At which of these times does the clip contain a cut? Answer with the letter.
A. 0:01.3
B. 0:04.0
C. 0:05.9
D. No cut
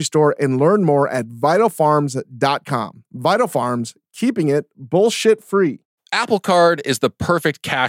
C